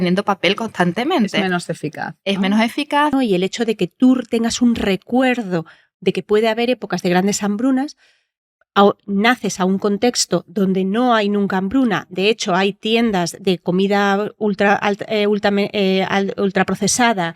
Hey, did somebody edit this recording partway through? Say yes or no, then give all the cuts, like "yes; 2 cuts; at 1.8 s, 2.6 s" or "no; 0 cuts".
yes; 1 cut; at 3.1 s